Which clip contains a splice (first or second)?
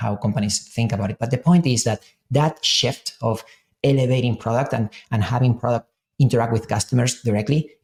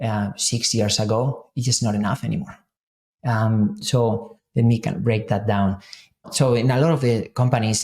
second